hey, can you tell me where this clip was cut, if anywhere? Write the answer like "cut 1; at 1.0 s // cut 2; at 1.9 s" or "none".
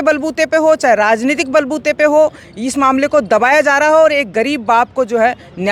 none